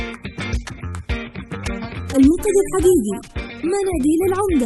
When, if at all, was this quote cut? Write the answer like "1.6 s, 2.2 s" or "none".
none